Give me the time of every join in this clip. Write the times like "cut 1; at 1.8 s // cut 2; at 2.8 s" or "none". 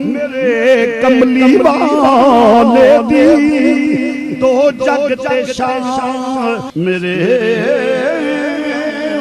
cut 1; at 6.7 s